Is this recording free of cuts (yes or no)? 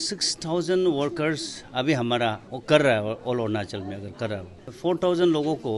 no